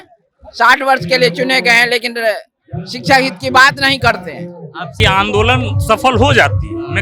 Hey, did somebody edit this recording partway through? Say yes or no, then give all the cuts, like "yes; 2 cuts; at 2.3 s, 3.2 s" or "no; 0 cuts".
yes; 1 cut; at 5.0 s